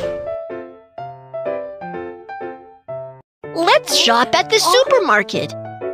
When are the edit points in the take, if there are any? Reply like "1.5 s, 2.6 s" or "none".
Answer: none